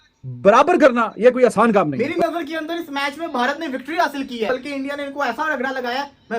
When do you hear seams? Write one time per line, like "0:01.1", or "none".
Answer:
0:02.0
0:04.5